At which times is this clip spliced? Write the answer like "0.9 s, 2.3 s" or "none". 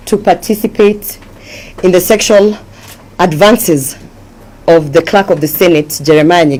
none